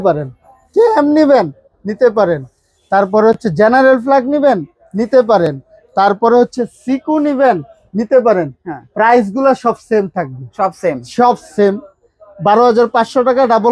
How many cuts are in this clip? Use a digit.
0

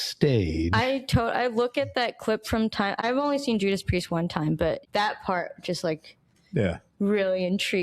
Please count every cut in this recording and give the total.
2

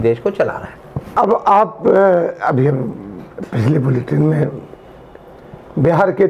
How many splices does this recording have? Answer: 0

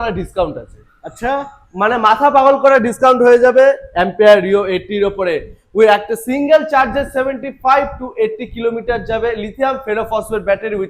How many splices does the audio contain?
0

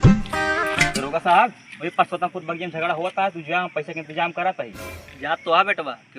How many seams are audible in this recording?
1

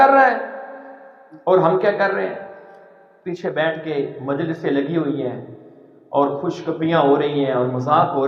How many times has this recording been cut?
0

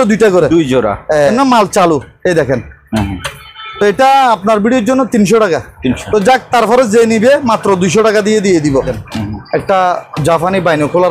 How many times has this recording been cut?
3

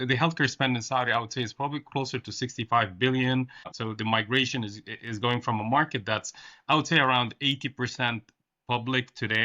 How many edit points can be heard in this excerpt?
1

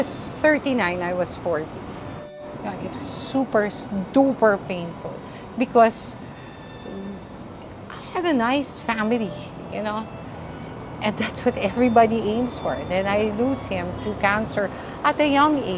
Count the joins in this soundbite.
1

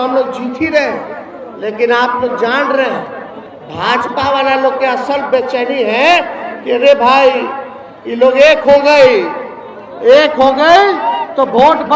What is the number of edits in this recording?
0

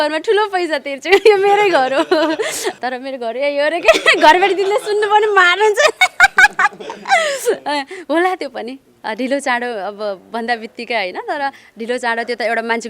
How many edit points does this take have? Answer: 1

